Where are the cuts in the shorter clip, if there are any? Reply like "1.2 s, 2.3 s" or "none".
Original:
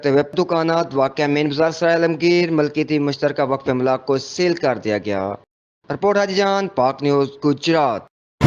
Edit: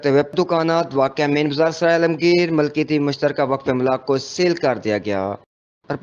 none